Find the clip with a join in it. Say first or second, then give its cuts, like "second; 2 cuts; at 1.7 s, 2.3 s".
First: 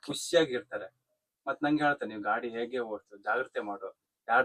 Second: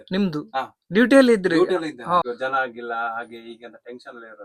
second; 1 cut; at 2.2 s